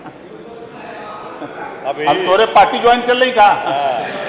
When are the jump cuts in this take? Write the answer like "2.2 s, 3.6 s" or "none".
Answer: 1.4 s